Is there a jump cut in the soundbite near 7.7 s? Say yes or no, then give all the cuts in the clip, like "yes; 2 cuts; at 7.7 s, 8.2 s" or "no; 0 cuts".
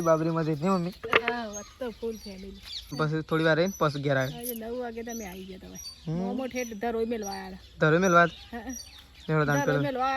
no; 1 cut; at 2.8 s